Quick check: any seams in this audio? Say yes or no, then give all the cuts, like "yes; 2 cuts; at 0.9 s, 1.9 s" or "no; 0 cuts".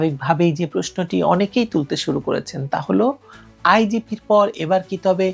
no; 0 cuts